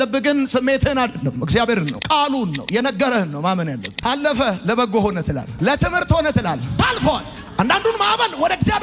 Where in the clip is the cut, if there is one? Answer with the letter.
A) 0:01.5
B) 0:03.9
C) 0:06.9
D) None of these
B